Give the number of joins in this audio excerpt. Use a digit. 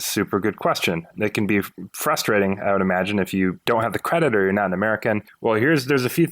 3